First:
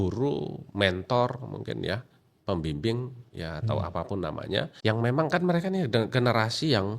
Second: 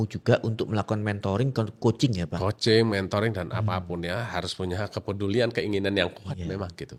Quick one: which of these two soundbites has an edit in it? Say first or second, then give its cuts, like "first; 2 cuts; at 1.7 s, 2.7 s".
first; 1 cut; at 4.7 s